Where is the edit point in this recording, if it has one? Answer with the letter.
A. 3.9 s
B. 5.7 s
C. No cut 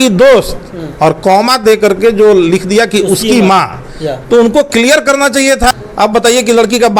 B